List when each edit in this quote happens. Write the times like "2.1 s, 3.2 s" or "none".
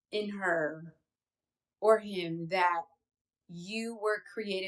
none